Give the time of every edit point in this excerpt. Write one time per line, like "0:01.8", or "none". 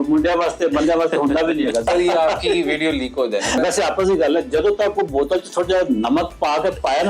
0:01.8
0:03.6